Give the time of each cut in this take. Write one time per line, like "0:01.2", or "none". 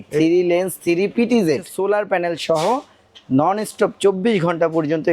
0:01.7